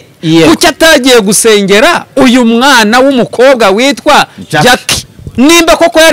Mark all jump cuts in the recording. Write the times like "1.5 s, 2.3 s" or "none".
5.2 s